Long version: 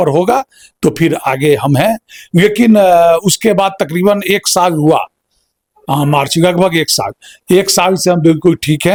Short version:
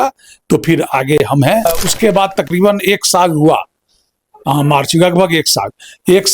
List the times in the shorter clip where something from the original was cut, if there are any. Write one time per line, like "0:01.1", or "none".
0:01.8